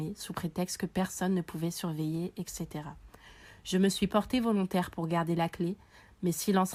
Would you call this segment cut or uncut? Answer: uncut